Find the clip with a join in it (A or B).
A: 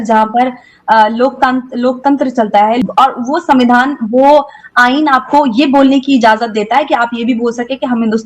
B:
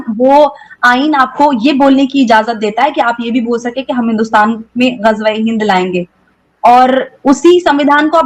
A